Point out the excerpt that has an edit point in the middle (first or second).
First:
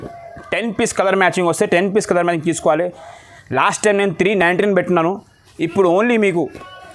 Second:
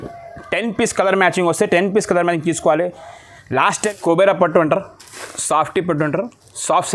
second